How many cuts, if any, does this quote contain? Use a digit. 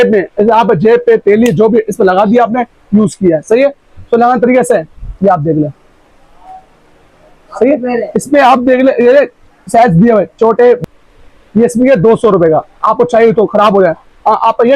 1